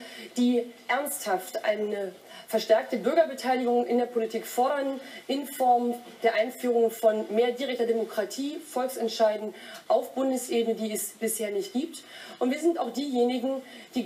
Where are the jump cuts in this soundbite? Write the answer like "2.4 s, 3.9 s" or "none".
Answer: 2.6 s